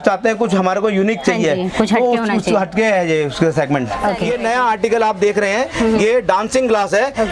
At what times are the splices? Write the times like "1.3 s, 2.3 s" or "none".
4.2 s